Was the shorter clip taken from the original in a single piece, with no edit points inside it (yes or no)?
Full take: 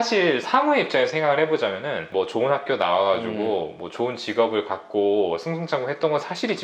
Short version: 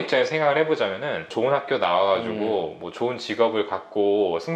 no